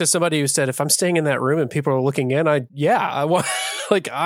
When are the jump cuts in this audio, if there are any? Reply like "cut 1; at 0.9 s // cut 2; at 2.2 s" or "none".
cut 1; at 2.7 s